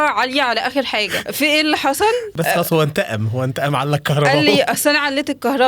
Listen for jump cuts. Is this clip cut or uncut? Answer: cut